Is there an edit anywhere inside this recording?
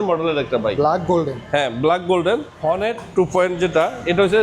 yes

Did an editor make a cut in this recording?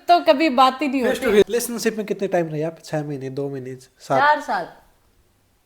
yes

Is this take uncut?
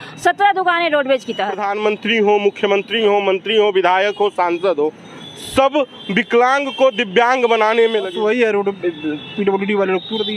no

